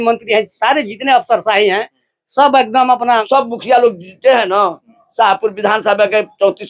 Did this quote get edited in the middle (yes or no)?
yes